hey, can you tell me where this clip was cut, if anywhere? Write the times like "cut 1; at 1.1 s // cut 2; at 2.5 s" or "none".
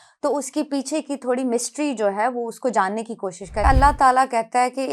cut 1; at 3.6 s